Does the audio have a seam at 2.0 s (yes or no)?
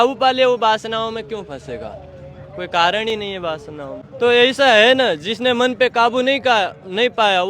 no